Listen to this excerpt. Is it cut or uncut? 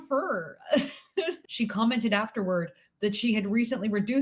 cut